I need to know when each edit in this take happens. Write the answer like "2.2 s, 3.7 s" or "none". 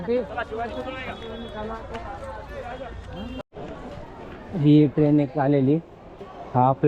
3.4 s